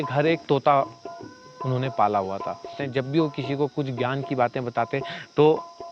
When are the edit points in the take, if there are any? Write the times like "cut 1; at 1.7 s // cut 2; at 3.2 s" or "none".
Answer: cut 1; at 2.8 s

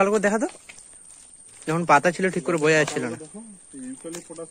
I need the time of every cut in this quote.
none

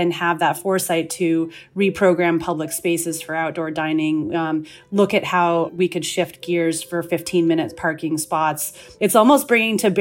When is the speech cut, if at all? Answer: cut 1; at 5.7 s // cut 2; at 8.9 s

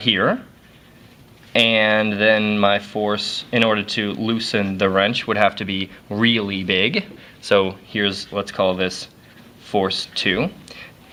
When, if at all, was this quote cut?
none

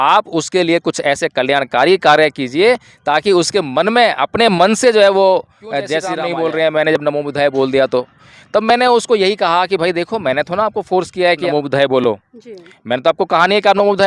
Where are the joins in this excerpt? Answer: cut 1; at 6.1 s // cut 2; at 11.4 s

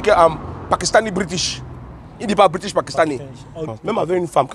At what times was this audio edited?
cut 1; at 3.6 s

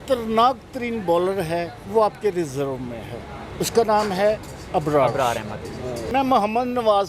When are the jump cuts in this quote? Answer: cut 1; at 6.0 s

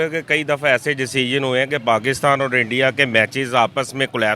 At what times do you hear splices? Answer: none

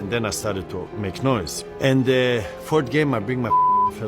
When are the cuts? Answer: cut 1; at 1.6 s

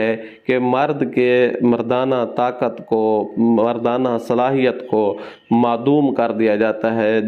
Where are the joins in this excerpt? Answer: none

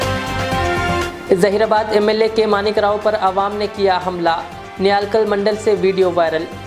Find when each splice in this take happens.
cut 1; at 1.0 s

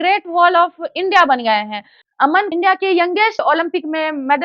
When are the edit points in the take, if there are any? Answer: cut 1; at 2.2 s

